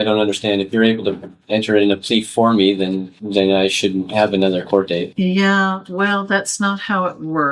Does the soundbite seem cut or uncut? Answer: uncut